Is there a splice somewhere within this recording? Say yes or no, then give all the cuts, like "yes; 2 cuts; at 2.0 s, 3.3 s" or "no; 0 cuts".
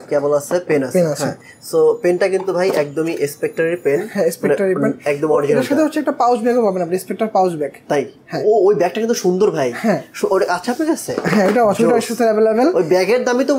no; 0 cuts